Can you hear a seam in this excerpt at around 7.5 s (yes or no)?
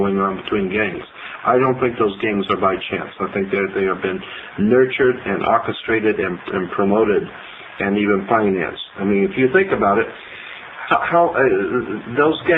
yes